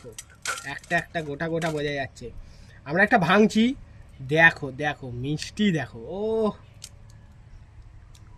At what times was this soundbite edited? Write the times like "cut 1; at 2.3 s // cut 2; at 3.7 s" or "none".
none